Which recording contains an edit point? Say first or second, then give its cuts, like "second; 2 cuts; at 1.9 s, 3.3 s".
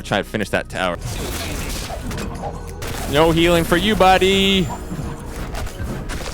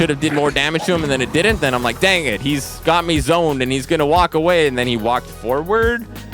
first; 1 cut; at 1.0 s